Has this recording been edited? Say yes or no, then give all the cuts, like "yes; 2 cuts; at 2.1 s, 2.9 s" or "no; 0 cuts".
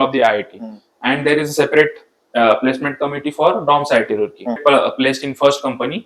yes; 1 cut; at 4.6 s